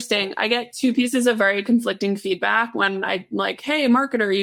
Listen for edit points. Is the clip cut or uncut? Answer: uncut